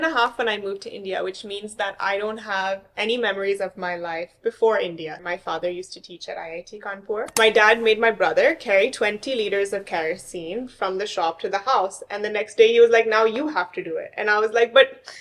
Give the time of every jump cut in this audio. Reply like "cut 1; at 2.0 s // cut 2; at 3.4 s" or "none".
cut 1; at 5.2 s // cut 2; at 7.3 s